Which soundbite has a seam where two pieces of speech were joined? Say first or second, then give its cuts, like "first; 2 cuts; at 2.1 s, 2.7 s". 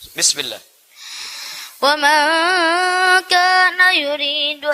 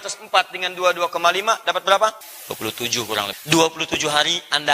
second; 2 cuts; at 2.3 s, 3.4 s